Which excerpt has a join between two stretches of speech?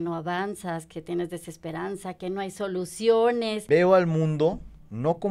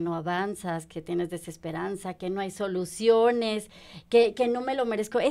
first; 1 cut; at 3.6 s

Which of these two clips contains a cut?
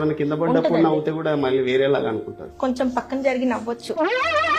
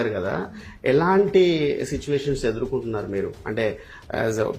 first; 1 cut; at 2.5 s

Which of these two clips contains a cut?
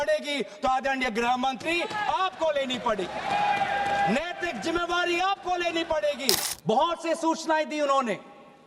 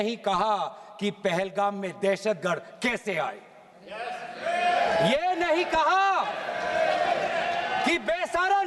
first; 1 cut; at 6.5 s

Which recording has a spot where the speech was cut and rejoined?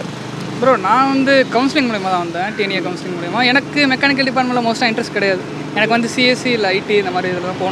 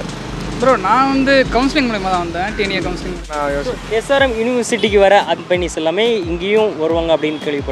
second; 2 cuts; at 3.3 s, 5.4 s

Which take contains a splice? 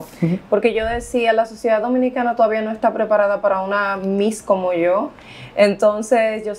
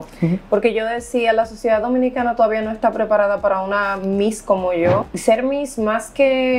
second; 1 cut; at 5.1 s

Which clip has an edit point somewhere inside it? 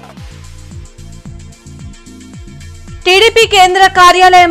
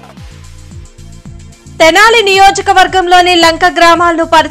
first; 2 cuts; at 1.1 s, 2.1 s

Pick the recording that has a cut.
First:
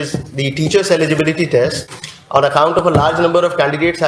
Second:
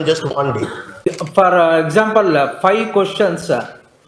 second; 1 cut; at 1.0 s

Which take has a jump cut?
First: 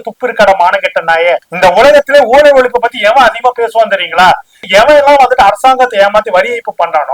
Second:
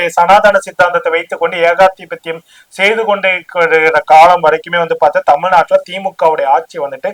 first; 1 cut; at 1.5 s

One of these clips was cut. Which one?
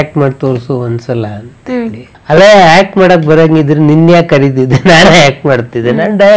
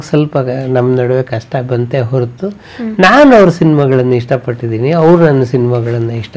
first; 1 cut; at 2.1 s

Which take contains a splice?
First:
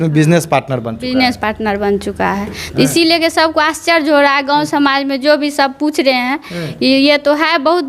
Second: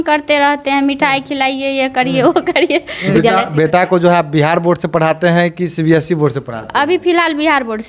second; 1 cut; at 3.1 s

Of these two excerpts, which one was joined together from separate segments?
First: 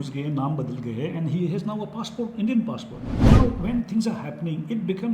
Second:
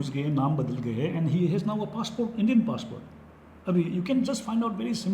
first; 1 cut; at 3.3 s

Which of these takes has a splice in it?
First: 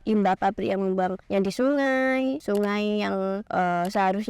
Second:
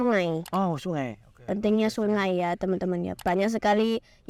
first; 3 cuts; at 1.2 s, 2.4 s, 3.4 s

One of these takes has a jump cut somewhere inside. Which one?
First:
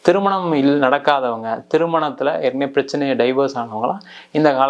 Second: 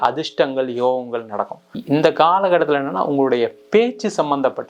second; 1 cut; at 1.7 s

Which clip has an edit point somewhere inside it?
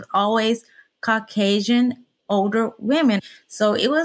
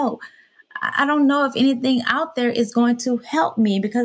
first; 2 cuts; at 2.1 s, 3.2 s

